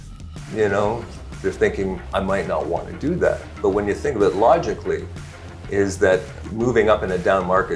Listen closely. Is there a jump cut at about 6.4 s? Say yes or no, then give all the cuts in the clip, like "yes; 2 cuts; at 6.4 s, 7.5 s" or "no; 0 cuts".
yes; 1 cut; at 6.4 s